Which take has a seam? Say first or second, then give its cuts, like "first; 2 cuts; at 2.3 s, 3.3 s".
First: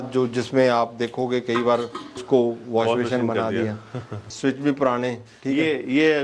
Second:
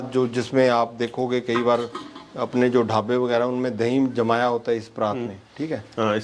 first; 2 cuts; at 2.2 s, 4.3 s